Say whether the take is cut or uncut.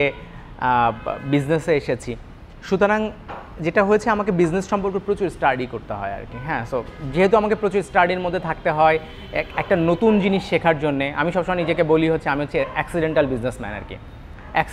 uncut